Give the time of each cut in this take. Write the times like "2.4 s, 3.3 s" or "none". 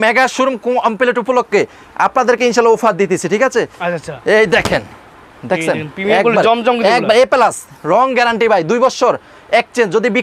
none